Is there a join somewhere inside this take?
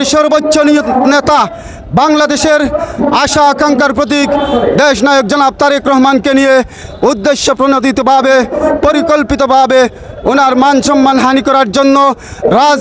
no; 0 cuts

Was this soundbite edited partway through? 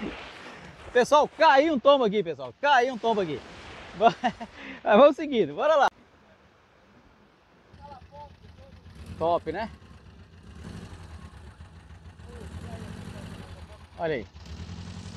yes; 1 cut; at 5.9 s

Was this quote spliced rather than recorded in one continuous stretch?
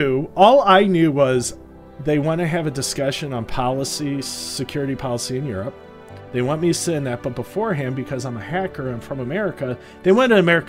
no; 0 cuts

